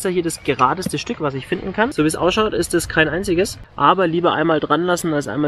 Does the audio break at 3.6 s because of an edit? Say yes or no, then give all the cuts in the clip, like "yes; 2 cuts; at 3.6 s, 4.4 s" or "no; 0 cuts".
yes; 2 cuts; at 1.9 s, 3.6 s